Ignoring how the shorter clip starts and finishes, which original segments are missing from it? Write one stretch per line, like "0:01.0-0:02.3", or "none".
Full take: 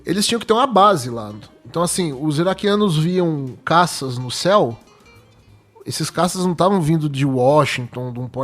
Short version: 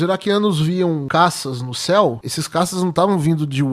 0:03.4-0:03.6
0:04.9-0:05.9